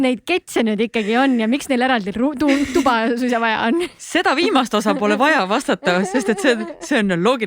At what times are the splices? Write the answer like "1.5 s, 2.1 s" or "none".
none